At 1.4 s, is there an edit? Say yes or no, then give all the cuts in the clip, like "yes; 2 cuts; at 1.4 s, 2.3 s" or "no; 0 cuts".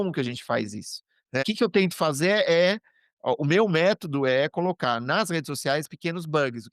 yes; 1 cut; at 1.4 s